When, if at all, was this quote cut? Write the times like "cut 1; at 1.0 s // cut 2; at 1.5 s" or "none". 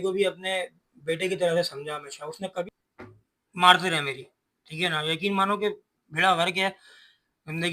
cut 1; at 2.6 s